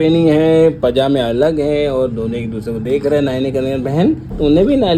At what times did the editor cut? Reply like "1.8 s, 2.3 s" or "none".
none